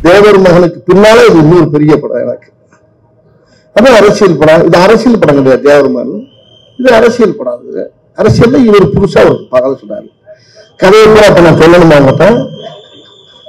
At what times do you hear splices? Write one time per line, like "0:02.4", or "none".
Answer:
none